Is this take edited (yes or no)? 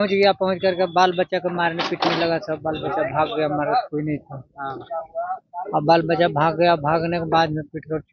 no